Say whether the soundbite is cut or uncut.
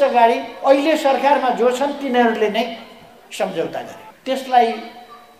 cut